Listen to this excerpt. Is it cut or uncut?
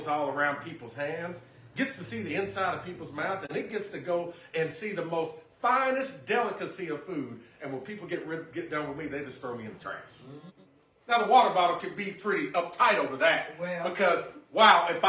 cut